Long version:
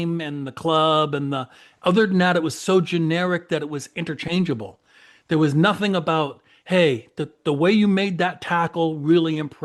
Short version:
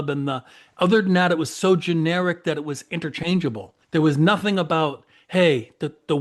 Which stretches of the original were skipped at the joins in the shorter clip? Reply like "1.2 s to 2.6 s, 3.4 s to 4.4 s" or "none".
4.8 s to 5.1 s